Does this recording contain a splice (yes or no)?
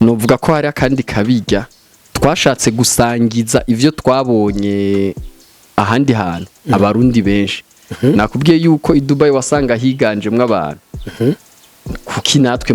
no